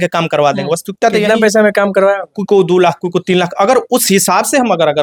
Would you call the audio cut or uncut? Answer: uncut